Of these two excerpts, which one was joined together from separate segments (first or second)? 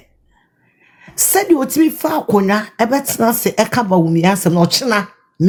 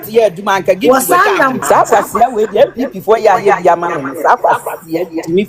second